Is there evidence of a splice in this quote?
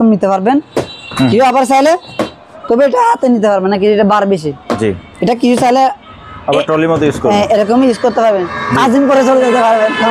no; 0 cuts

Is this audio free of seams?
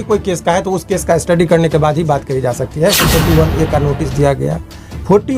no; 1 cut; at 3.0 s

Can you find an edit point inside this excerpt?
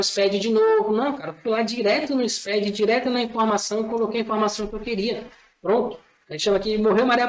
no; 0 cuts

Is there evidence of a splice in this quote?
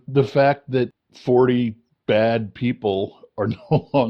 yes; 2 cuts; at 1.1 s, 1.9 s

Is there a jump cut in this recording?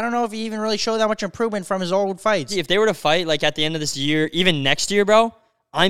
yes; 1 cut; at 2.5 s

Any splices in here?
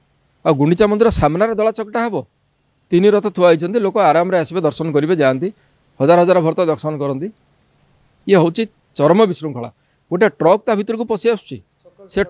no; 0 cuts

